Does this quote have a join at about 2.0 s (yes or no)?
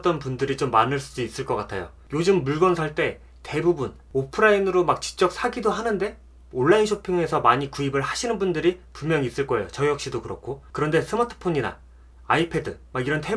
yes